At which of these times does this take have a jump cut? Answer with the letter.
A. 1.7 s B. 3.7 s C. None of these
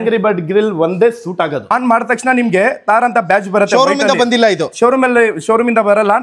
A